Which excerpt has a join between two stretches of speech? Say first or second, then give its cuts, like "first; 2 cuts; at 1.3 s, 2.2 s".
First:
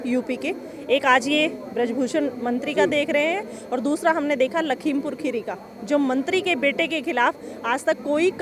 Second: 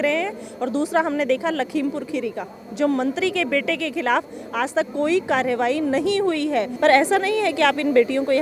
second; 1 cut; at 6.7 s